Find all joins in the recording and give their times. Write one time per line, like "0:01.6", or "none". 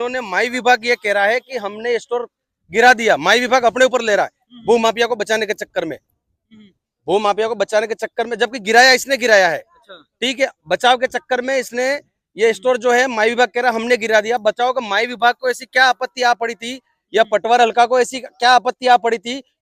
none